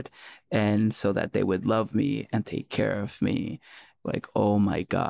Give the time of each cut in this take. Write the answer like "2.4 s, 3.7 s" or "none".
4.0 s